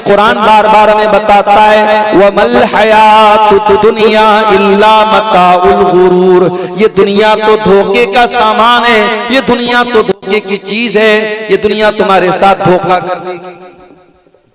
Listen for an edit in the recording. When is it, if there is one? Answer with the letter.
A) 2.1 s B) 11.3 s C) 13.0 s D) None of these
D